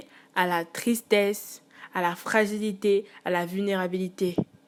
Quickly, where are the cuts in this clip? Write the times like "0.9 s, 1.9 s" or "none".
none

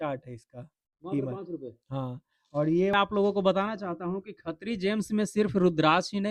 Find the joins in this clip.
2.9 s

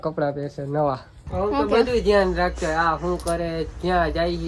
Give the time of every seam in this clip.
1.2 s

